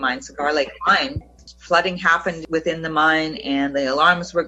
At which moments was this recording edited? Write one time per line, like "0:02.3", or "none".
0:01.2
0:02.4